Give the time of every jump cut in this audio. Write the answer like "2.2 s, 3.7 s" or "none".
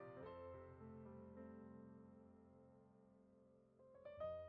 none